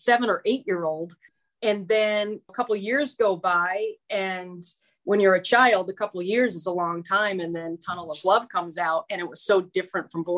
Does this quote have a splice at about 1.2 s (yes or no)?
yes